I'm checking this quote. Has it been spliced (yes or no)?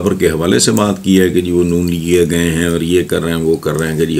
no